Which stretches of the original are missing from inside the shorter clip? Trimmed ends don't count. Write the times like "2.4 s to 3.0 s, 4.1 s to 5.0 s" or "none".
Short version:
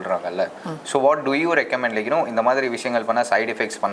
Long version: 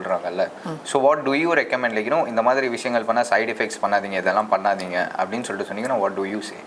none